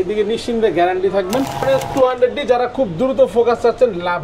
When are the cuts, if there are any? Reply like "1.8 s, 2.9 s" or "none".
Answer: 1.6 s